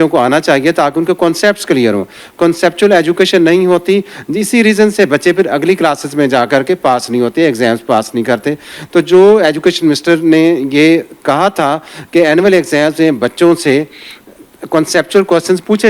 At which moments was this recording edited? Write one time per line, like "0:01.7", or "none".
none